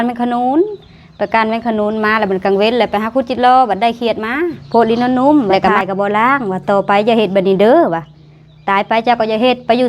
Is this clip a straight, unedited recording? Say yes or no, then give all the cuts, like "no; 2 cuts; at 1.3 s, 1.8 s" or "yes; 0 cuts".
no; 1 cut; at 4.6 s